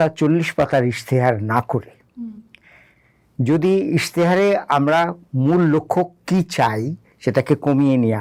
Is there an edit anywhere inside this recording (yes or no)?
no